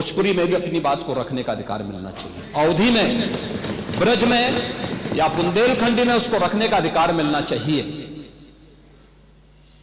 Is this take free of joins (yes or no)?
yes